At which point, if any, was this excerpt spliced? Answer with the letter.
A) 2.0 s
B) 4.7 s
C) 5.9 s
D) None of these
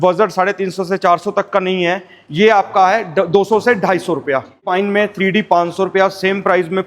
B